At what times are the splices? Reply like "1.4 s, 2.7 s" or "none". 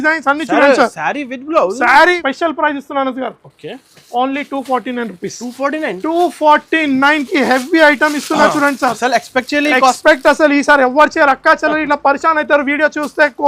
2.2 s